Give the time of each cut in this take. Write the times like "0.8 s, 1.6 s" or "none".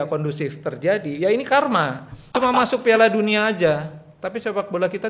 2.3 s